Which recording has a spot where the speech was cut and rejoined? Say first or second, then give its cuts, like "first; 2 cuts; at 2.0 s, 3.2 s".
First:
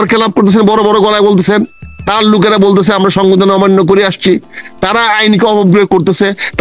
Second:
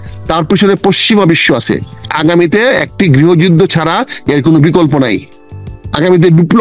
second; 1 cut; at 2.1 s